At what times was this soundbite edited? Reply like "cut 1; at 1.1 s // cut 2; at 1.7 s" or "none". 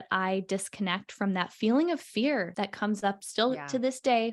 cut 1; at 2.9 s